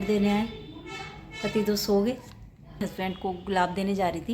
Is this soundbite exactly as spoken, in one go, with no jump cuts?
no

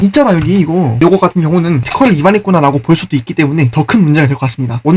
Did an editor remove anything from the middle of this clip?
no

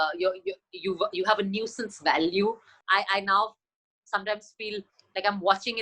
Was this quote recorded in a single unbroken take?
no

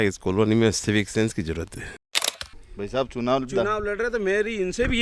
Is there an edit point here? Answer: yes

